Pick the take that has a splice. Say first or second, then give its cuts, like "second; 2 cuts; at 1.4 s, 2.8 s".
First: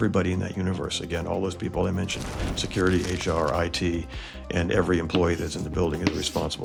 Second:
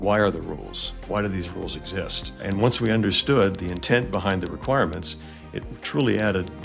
second; 1 cut; at 2.4 s